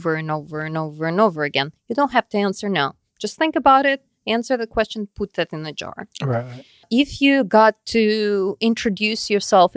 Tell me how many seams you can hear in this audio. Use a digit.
1